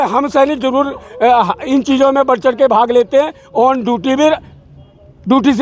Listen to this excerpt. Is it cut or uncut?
uncut